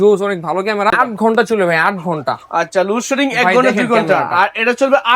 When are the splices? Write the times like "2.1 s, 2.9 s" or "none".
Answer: 0.9 s